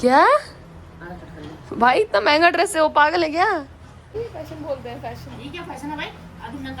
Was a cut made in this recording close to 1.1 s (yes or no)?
no